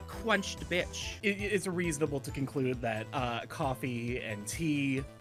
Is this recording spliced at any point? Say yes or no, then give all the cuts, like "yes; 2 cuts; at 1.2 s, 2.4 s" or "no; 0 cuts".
no; 0 cuts